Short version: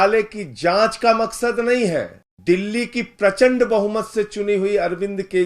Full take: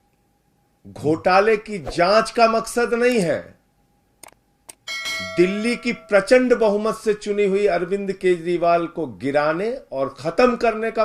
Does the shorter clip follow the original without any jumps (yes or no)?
no